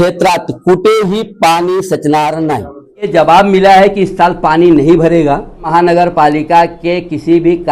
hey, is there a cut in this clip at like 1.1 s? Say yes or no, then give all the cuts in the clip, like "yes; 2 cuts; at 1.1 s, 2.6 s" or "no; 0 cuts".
no; 2 cuts; at 3.1 s, 5.7 s